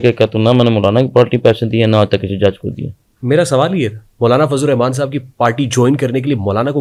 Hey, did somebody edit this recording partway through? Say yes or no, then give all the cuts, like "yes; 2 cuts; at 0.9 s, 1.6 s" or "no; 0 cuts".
no; 0 cuts